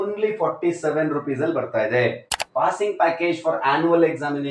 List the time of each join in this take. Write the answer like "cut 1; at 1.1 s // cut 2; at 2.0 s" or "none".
cut 1; at 2.3 s